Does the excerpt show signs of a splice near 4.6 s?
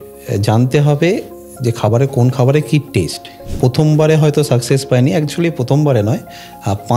no; 1 cut; at 3.4 s

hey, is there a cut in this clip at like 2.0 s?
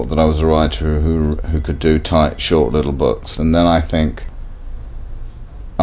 no; 2 cuts; at 3.3 s, 4.3 s

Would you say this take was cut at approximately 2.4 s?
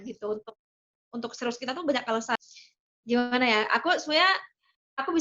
yes; 1 cut; at 2.4 s

